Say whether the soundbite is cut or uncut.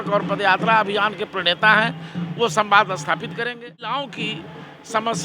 cut